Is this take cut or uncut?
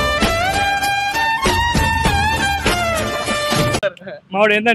uncut